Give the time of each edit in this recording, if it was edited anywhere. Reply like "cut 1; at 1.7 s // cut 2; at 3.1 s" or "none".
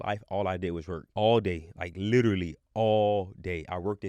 cut 1; at 1.0 s